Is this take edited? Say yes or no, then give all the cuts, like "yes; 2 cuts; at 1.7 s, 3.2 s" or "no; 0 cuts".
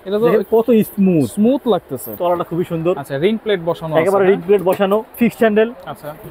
yes; 2 cuts; at 2.1 s, 5.2 s